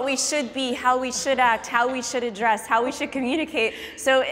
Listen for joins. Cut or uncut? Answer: uncut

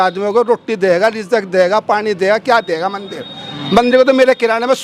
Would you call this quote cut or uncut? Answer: uncut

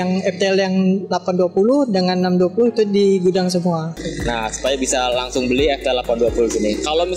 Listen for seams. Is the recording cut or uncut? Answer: cut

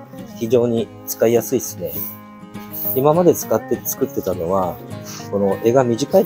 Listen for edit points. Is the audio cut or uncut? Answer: uncut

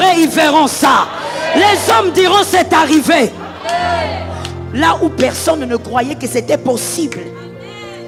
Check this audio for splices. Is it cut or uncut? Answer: uncut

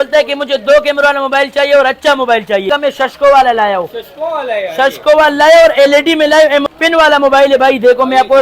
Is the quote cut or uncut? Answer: cut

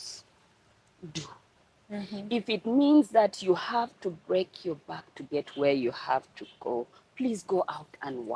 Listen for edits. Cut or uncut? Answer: uncut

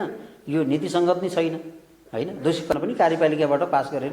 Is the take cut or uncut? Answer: cut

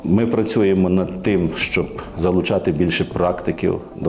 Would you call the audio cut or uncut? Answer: uncut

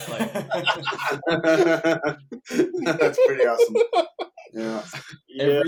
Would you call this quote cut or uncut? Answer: uncut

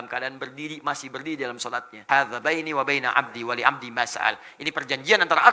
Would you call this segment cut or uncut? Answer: cut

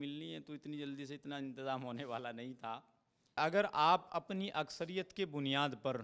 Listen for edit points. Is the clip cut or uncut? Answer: cut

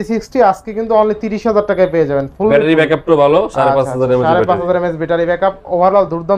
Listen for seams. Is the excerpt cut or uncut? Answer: uncut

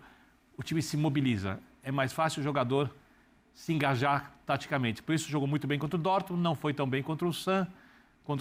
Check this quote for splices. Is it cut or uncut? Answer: uncut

